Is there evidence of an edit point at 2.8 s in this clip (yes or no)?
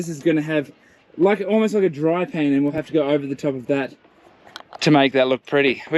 no